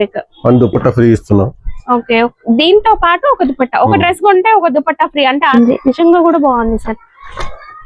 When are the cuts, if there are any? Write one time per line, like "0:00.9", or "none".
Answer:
0:05.5